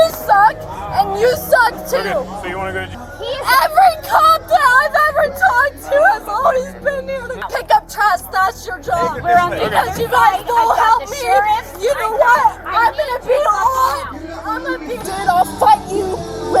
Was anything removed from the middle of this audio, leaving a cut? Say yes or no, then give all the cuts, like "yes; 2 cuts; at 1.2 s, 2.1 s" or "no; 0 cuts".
yes; 3 cuts; at 3.0 s, 7.4 s, 15.0 s